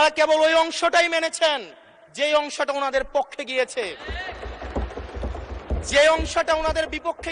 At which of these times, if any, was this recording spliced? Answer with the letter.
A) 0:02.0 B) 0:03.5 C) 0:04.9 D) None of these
D